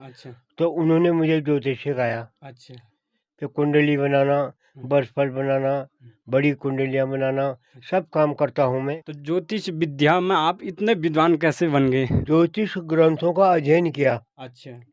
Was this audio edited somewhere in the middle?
yes; 2 cuts; at 9.1 s, 12.2 s

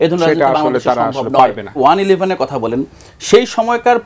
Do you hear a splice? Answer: yes; 1 cut; at 1.8 s

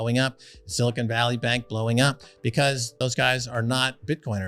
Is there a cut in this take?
yes; 1 cut; at 2.9 s

